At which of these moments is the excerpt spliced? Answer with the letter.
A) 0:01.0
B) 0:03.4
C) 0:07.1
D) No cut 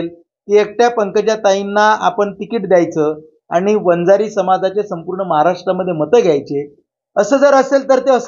D